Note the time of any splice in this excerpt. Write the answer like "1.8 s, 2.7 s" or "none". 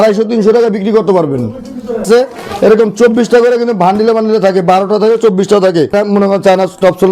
2.0 s, 5.9 s